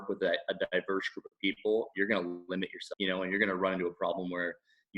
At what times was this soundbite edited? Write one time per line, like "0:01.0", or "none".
0:02.8

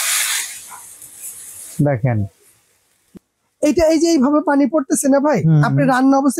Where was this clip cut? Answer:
none

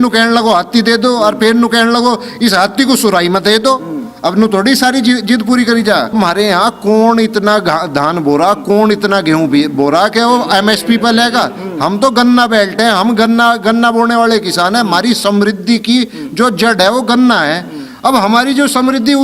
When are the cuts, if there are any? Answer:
0:06.1

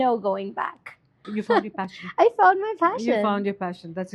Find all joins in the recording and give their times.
0:01.3

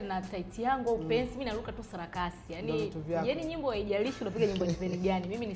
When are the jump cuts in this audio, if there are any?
none

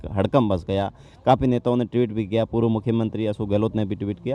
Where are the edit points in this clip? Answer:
none

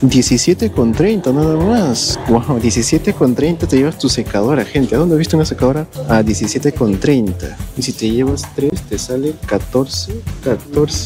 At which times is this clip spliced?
none

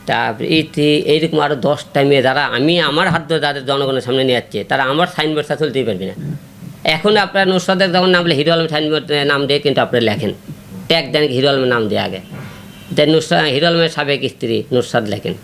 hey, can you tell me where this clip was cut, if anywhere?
none

